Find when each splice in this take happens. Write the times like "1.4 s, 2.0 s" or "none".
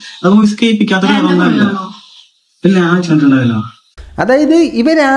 none